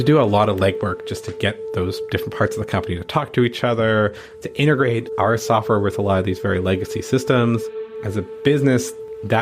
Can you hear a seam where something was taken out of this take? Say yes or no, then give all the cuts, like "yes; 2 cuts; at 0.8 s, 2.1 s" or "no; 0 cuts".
yes; 1 cut; at 8.0 s